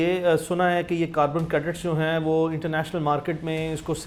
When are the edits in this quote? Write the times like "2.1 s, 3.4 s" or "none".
none